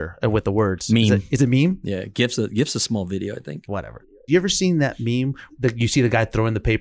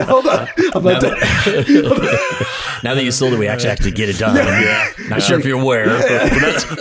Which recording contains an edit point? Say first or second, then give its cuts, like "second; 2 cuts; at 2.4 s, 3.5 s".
first; 2 cuts; at 4.0 s, 5.4 s